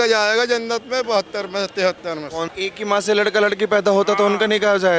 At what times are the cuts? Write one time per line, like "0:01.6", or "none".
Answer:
0:02.5